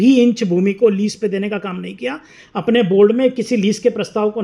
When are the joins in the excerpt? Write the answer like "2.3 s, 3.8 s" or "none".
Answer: none